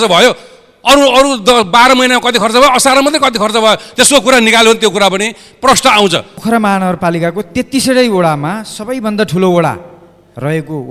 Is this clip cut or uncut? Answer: cut